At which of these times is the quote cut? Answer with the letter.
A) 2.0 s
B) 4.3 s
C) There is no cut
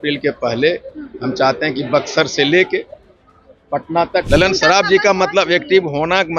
B